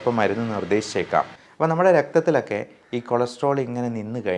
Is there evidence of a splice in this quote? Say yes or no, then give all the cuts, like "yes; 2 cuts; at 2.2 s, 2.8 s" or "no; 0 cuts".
yes; 1 cut; at 1.4 s